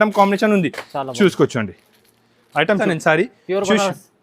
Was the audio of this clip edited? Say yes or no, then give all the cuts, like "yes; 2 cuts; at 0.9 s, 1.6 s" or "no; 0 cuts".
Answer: yes; 1 cut; at 2.8 s